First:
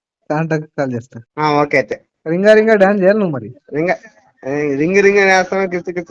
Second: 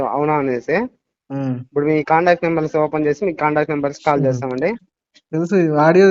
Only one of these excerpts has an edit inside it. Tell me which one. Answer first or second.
first